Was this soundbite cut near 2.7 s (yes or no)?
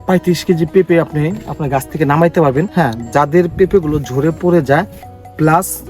yes